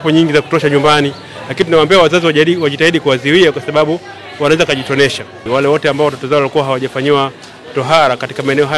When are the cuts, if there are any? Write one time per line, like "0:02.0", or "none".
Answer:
0:05.4